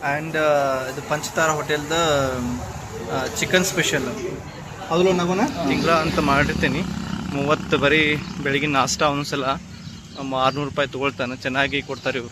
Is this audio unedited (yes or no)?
no